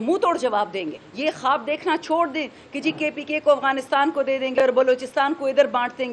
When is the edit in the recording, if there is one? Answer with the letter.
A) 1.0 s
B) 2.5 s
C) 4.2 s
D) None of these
A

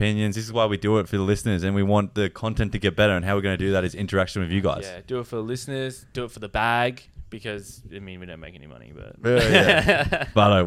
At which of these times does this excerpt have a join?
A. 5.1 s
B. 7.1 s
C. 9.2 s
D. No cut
D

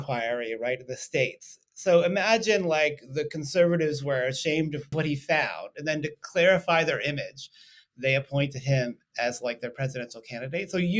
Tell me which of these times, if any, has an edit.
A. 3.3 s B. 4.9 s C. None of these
B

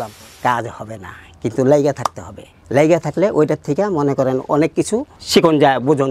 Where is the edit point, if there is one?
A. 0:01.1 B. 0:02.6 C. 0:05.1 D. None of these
D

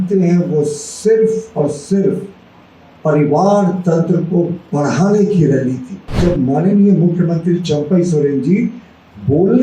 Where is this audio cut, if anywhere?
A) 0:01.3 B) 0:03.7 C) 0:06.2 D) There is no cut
C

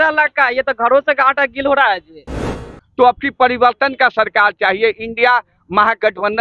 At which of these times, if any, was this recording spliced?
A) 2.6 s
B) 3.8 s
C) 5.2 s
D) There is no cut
A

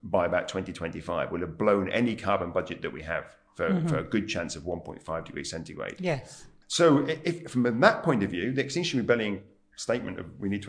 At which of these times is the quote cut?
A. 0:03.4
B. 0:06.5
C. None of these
B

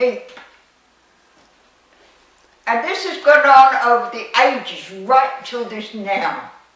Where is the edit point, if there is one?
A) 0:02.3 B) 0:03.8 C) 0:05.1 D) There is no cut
B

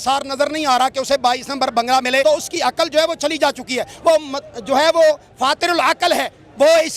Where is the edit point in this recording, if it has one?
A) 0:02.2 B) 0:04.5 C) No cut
A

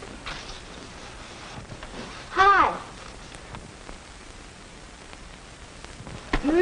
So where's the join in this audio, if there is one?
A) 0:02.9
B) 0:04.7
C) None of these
A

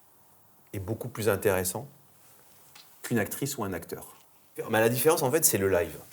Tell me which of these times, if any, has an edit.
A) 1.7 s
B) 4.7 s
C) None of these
B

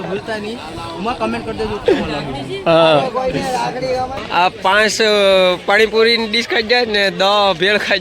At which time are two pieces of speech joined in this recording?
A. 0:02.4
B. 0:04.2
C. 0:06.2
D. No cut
B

